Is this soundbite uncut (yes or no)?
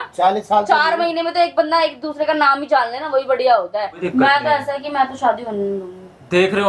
no